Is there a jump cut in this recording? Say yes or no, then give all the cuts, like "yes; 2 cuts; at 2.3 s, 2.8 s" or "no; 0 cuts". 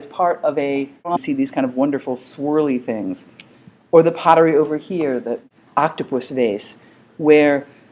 no; 0 cuts